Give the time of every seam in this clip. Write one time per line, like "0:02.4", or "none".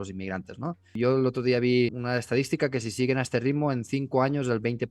0:00.9
0:02.0